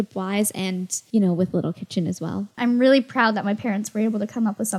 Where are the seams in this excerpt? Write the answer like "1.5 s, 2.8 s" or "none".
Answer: 0.9 s, 2.6 s